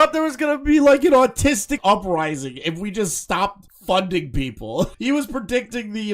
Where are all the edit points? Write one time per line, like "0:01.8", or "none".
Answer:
0:01.8
0:04.9